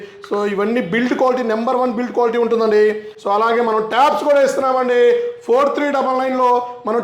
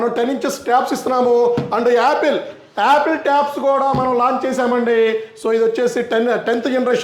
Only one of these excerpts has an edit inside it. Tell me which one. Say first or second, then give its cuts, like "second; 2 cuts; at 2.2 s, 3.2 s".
first; 1 cut; at 3.1 s